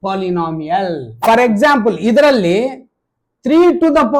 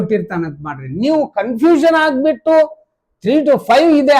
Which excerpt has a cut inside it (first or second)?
first